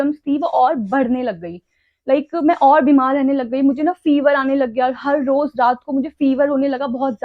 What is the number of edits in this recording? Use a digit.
0